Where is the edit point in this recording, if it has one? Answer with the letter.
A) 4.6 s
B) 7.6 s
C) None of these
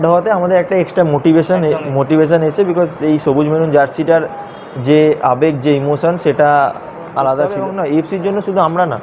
B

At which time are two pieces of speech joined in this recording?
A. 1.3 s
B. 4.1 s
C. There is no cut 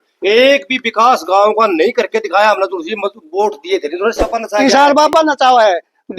B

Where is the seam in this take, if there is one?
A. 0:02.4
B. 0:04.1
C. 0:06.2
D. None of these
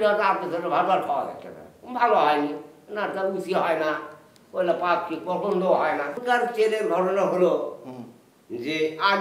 C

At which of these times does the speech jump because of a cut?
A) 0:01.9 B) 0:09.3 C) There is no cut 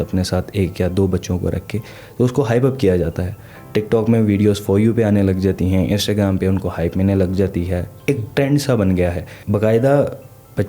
B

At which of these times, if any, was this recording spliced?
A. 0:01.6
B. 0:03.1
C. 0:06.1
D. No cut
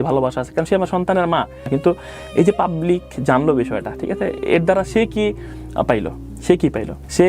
D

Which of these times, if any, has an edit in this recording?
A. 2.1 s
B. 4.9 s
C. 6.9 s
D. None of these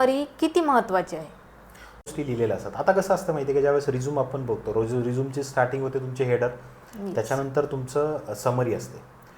A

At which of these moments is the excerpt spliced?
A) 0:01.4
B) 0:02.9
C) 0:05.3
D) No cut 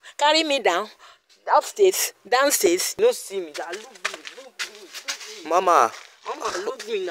B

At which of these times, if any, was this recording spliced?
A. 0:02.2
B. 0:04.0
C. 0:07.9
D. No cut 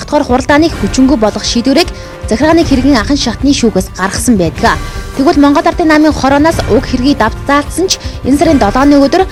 D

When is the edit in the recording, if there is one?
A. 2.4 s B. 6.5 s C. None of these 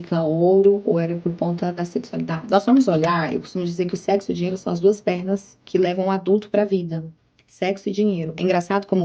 A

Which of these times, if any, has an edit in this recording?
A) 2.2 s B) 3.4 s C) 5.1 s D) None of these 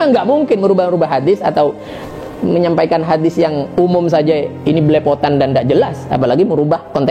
D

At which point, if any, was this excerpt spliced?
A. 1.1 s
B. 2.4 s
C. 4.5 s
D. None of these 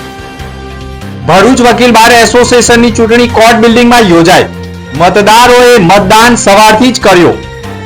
A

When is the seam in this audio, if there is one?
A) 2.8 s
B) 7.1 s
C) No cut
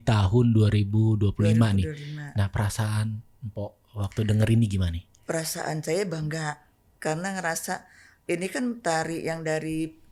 C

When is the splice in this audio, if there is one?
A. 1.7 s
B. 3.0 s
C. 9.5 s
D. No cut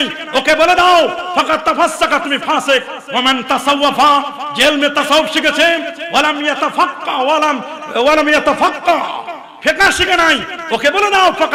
D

